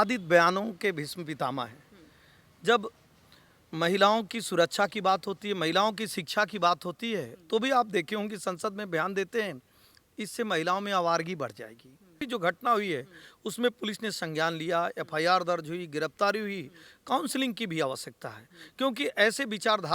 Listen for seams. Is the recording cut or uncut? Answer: cut